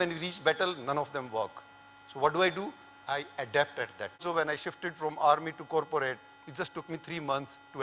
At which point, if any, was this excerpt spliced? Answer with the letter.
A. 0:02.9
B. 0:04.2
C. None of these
B